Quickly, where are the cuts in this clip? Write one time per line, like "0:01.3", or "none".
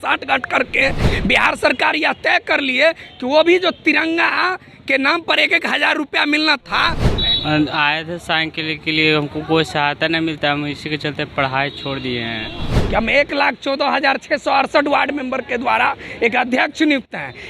0:07.1
0:12.8